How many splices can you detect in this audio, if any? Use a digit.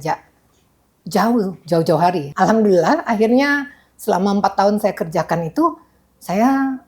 1